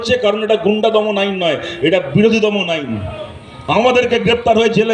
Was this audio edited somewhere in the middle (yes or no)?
yes